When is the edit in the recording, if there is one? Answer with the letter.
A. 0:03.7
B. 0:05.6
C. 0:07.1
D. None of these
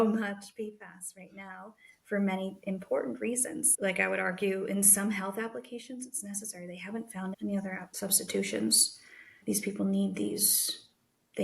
A